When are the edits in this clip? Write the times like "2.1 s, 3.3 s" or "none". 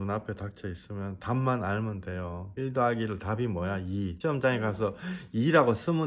2.4 s, 4.1 s